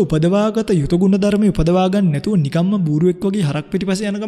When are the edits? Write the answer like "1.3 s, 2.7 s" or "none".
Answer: none